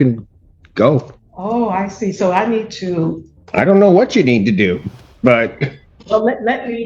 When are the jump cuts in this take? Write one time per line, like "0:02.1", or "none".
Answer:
0:01.2
0:05.9